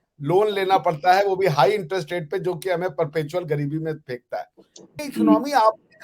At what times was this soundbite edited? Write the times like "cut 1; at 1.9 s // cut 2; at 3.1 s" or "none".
cut 1; at 5.0 s